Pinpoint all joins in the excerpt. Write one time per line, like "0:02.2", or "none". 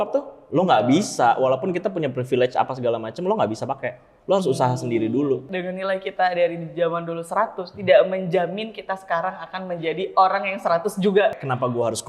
0:05.5
0:11.3

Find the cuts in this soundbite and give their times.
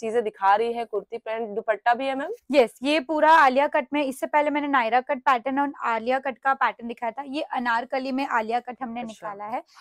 none

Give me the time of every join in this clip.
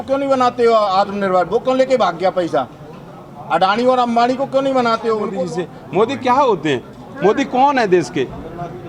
0:05.3

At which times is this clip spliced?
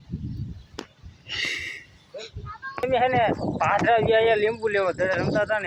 none

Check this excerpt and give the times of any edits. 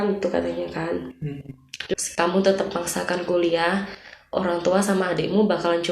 0:01.9

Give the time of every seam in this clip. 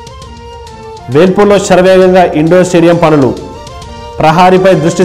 none

